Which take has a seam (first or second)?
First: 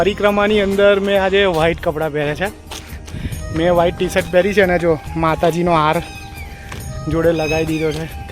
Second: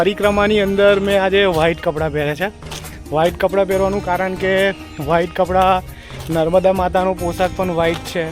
first